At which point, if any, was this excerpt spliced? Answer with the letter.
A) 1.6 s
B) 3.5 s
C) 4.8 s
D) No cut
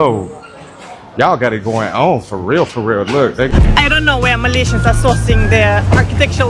B